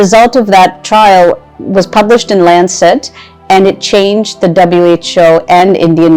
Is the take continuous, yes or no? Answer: yes